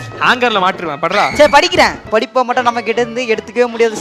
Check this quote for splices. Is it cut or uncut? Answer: cut